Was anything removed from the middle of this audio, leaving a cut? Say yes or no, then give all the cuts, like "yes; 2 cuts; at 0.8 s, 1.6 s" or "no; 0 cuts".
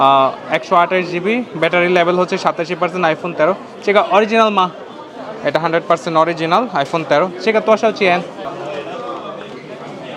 yes; 1 cut; at 8.4 s